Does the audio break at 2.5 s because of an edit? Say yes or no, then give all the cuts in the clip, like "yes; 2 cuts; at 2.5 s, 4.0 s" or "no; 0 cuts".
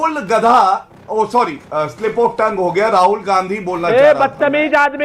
no; 1 cut; at 1.0 s